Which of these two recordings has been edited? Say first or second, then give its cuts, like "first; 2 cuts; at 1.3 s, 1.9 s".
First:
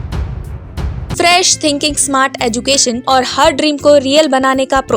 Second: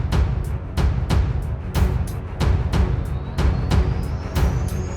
first; 2 cuts; at 1.0 s, 3.0 s